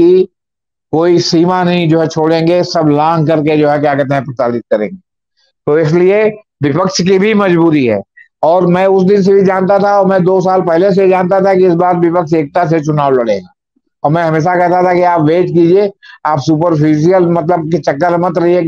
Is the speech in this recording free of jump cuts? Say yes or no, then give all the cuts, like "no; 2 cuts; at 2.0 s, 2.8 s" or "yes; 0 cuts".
yes; 0 cuts